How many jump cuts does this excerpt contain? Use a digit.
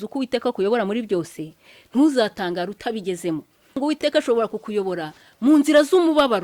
1